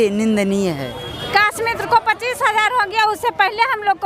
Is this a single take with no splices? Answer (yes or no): no